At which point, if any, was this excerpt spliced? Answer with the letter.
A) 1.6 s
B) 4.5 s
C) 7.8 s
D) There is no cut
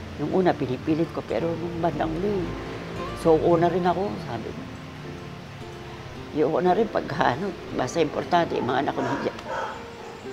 D